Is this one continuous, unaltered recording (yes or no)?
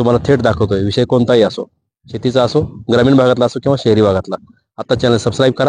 yes